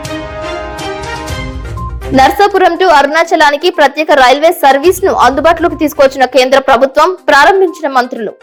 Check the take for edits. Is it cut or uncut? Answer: uncut